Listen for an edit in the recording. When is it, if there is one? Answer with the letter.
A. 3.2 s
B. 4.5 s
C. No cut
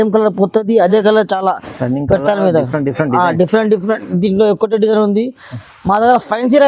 C